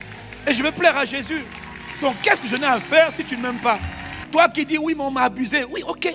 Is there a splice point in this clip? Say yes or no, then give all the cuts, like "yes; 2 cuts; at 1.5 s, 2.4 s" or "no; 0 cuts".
yes; 1 cut; at 4.2 s